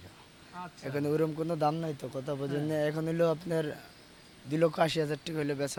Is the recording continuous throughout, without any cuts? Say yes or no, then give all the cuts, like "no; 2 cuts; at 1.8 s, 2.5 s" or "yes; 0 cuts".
yes; 0 cuts